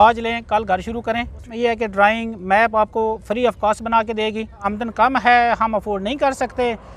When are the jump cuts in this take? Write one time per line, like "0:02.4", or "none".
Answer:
0:01.4
0:04.7